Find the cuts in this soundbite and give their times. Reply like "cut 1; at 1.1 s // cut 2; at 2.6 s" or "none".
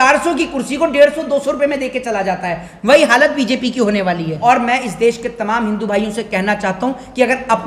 cut 1; at 4.3 s

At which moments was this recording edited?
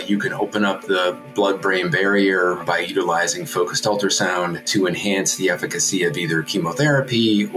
cut 1; at 2.6 s // cut 2; at 4.6 s

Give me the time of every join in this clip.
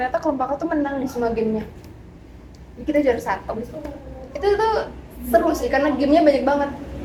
none

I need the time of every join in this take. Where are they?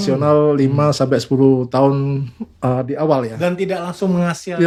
none

